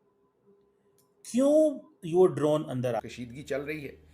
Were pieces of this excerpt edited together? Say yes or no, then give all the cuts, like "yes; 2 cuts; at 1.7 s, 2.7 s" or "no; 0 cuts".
yes; 1 cut; at 3.1 s